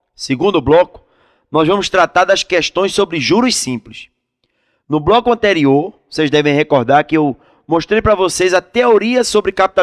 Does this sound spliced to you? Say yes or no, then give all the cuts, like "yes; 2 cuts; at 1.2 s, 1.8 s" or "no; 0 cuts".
no; 0 cuts